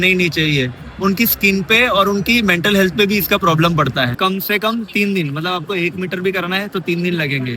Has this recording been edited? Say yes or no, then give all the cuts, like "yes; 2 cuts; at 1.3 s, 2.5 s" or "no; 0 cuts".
yes; 1 cut; at 4.1 s